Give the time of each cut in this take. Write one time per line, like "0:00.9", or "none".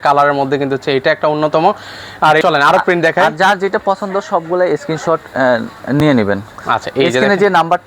0:02.4